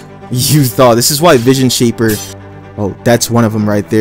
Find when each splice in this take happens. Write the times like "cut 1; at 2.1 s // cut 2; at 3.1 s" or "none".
cut 1; at 2.4 s